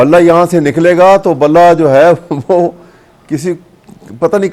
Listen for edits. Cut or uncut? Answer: uncut